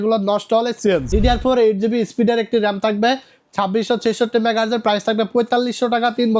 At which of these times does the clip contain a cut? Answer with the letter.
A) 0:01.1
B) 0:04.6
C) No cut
A